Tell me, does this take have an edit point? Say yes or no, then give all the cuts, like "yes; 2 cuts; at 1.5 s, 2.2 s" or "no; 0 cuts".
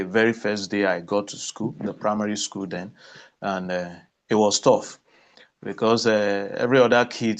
no; 0 cuts